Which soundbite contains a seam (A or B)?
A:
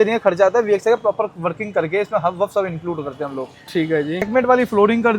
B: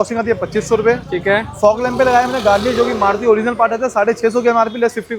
A